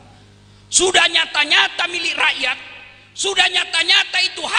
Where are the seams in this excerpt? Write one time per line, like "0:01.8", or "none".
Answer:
none